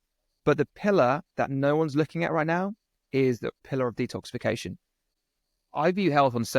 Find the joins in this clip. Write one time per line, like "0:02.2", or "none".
0:03.6
0:05.2

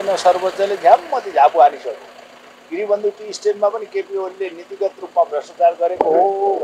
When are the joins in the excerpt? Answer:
none

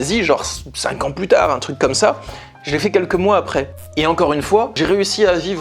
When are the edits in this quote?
0:03.9

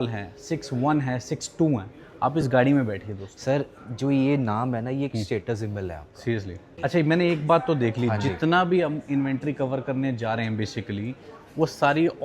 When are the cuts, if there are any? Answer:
0:06.6

